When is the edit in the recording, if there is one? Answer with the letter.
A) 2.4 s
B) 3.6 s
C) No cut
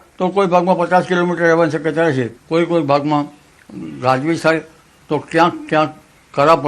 A